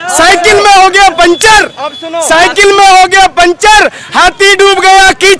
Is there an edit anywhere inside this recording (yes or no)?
no